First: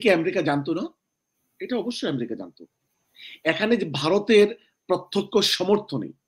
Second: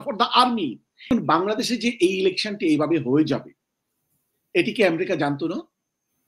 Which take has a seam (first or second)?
second